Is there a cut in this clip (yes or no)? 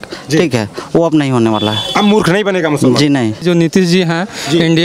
yes